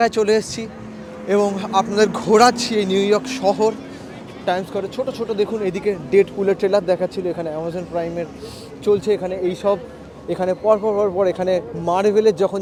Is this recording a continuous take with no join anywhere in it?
yes; 0 cuts

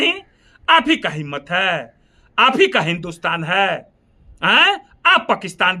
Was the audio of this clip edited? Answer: no; 0 cuts

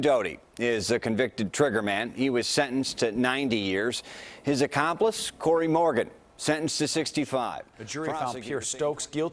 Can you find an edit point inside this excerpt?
yes; 1 cut; at 7.9 s

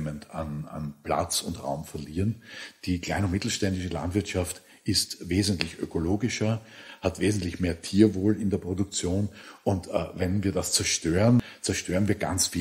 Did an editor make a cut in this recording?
yes; 3 cuts; at 6.8 s, 9.4 s, 11.5 s

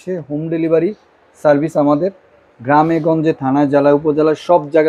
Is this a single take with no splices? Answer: yes; 0 cuts

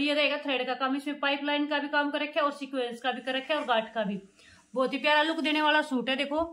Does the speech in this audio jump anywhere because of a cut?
no; 0 cuts

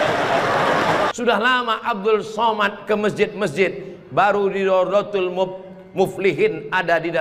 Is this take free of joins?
no; 1 cut; at 1.1 s

